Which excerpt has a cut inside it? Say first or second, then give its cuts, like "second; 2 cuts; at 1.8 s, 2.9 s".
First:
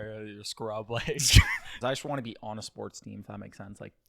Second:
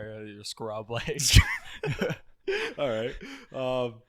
first; 1 cut; at 1.8 s